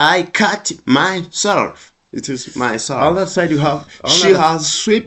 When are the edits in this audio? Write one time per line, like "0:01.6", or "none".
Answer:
0:03.0

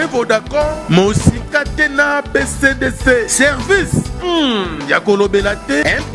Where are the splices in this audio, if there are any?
none

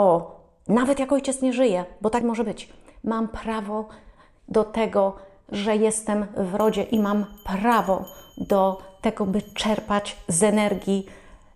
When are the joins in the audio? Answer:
none

